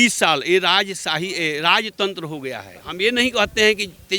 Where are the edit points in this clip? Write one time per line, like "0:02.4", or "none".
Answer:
0:02.8